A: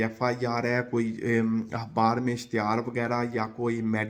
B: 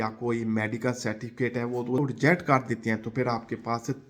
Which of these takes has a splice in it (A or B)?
B